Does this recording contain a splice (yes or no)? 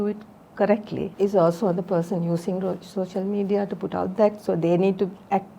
yes